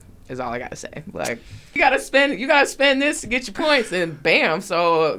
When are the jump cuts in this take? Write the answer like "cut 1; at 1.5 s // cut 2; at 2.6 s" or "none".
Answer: cut 1; at 1.7 s